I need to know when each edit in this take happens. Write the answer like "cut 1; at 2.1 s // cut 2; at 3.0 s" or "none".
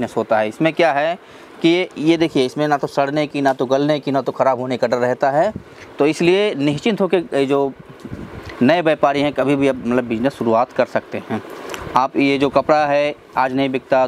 none